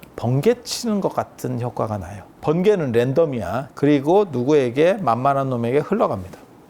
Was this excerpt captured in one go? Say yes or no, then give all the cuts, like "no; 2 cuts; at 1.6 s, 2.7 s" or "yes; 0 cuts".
no; 2 cuts; at 2.3 s, 3.6 s